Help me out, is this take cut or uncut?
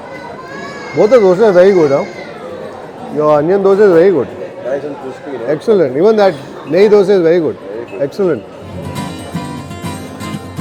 uncut